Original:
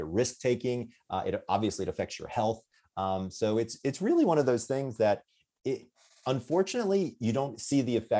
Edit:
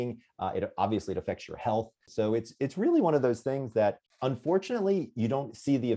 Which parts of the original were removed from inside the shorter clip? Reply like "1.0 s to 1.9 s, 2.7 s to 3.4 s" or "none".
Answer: 2.8 s to 3.3 s, 5.3 s to 6.1 s